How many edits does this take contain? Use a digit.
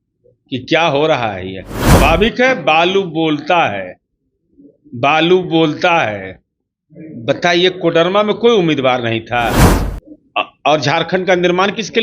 2